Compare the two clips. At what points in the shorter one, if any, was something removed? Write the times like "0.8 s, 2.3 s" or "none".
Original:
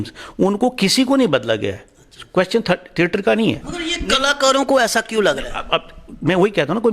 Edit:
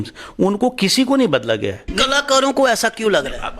1.9 s